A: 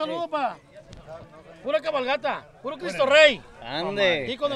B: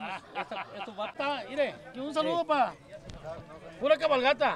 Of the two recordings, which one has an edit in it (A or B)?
B